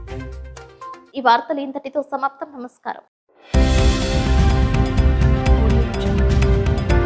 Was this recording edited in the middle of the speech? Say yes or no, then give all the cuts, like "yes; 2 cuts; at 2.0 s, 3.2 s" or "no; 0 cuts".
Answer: no; 0 cuts